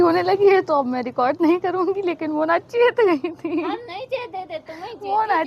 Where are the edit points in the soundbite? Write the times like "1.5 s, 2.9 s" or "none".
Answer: none